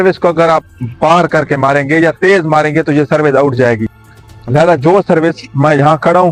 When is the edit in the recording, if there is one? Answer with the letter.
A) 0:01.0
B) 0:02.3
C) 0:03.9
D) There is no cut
D